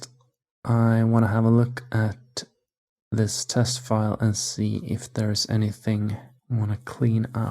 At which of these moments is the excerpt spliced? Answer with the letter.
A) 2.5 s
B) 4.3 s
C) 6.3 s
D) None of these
C